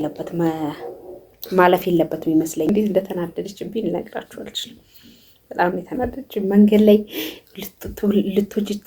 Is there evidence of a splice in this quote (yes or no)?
yes